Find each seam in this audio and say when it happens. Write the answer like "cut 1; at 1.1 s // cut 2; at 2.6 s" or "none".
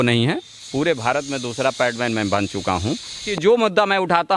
cut 1; at 3.3 s